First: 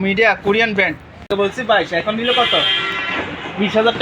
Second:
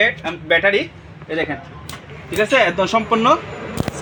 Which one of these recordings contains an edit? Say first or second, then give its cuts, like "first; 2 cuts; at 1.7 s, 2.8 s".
first; 1 cut; at 1.3 s